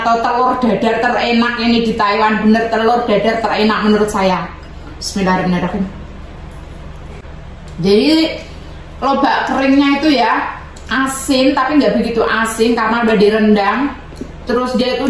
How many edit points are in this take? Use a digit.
1